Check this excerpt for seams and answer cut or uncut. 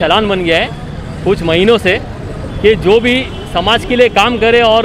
uncut